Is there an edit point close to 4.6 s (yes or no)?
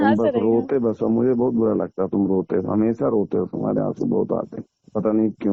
no